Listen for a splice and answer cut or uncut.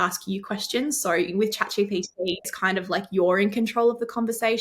cut